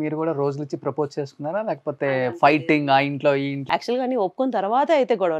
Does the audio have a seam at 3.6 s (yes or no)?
yes